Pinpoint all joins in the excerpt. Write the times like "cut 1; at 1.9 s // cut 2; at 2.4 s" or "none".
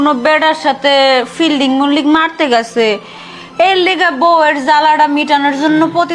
none